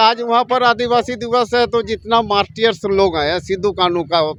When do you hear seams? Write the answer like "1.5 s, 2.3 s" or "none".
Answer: none

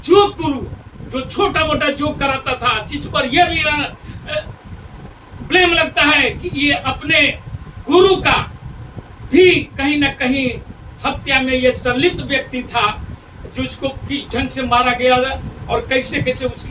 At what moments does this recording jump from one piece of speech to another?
none

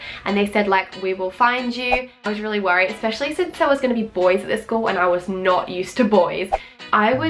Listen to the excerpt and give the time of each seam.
2.1 s, 6.5 s

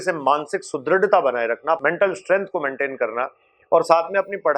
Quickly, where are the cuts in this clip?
1.8 s

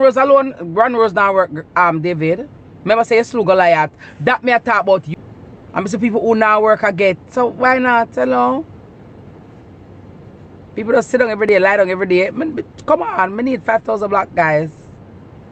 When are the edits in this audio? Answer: 5.1 s

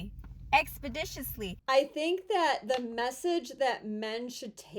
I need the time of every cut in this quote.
1.5 s

